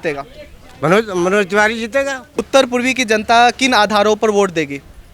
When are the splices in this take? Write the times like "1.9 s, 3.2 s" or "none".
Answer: 2.5 s